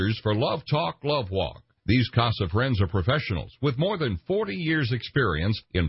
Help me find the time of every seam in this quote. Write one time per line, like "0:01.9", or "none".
0:01.7